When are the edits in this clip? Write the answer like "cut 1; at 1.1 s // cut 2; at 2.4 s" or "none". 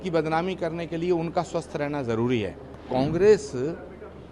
cut 1; at 2.8 s